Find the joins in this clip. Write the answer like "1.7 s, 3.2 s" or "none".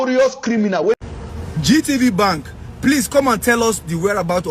1.0 s